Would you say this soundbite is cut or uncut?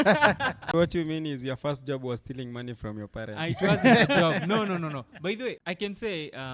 cut